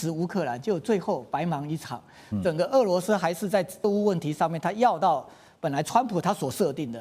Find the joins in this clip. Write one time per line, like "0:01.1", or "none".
0:03.9